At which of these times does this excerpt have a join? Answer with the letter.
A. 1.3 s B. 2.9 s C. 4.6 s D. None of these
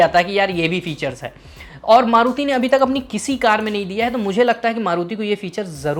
D